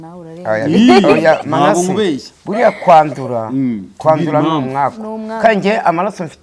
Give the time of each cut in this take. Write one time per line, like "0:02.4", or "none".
none